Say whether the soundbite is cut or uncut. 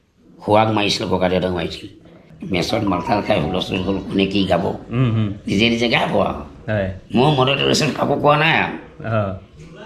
cut